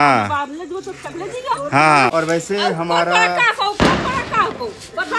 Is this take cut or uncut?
cut